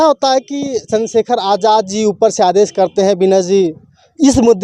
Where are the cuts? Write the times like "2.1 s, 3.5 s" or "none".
none